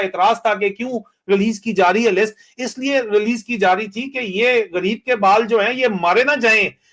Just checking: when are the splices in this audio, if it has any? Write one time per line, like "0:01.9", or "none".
none